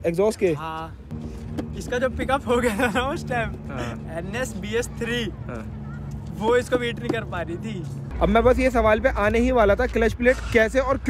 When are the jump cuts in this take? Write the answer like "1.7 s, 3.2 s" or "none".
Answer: 1.1 s, 8.0 s